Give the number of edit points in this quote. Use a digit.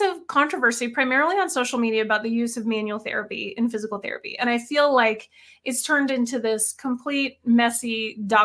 0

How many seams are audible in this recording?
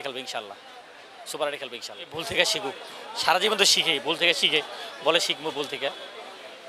1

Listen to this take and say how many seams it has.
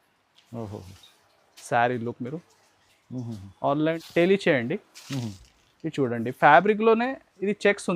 1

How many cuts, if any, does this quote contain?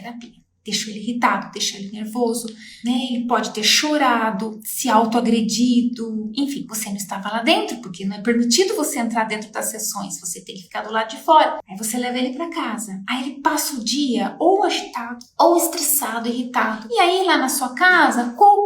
1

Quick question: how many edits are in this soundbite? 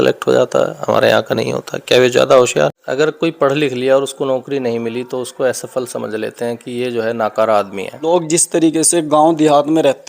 2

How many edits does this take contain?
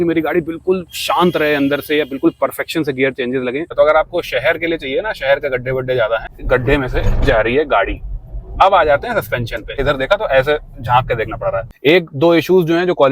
4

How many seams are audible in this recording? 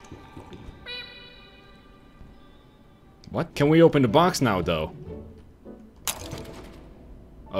1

